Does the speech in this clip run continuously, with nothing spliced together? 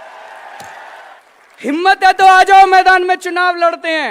no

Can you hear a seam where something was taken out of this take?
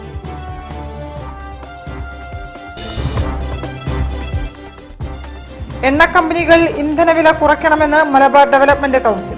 yes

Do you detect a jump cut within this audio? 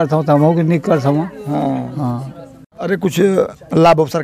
no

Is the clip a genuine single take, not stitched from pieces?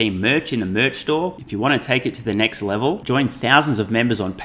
yes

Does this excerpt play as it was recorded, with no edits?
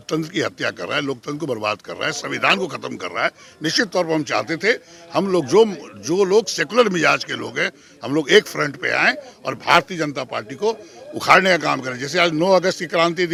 yes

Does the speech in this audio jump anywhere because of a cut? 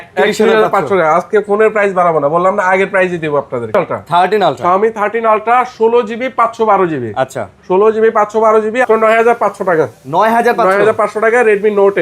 yes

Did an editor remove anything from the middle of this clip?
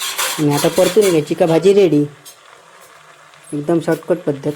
no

